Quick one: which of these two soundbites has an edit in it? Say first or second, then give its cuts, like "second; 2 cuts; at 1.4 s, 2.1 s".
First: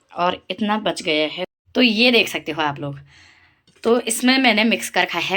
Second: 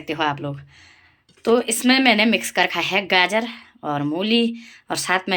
first; 1 cut; at 1.5 s